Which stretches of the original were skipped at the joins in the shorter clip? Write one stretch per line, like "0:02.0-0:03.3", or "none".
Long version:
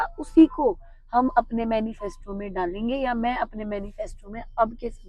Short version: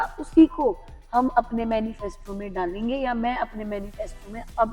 none